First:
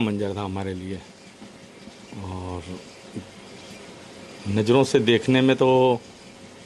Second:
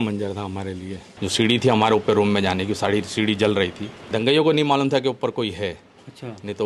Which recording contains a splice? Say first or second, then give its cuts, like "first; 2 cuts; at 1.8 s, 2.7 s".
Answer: second; 2 cuts; at 1.0 s, 3.9 s